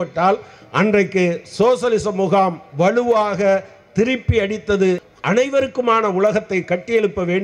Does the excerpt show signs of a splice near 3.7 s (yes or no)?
no